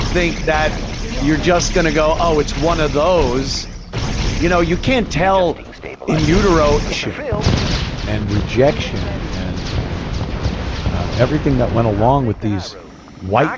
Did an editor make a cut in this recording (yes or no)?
yes